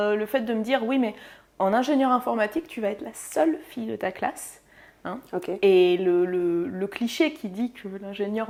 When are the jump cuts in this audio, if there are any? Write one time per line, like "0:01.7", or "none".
none